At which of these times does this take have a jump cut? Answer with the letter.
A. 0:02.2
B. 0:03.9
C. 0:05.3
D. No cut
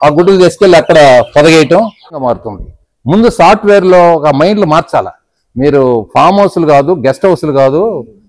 A